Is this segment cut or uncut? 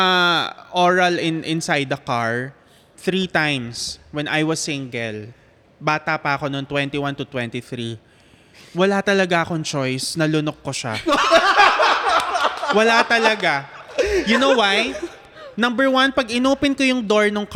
uncut